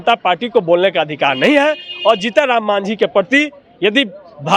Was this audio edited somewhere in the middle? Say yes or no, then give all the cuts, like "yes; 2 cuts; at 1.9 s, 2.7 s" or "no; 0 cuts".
no; 0 cuts